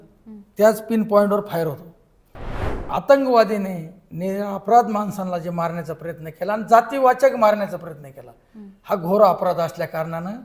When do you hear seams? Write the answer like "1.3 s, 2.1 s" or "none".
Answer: 2.6 s